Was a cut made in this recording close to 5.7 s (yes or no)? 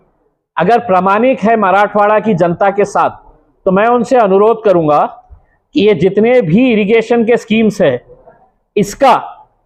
no